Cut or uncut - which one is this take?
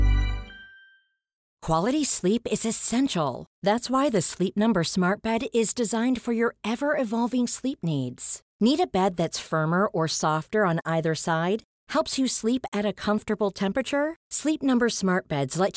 cut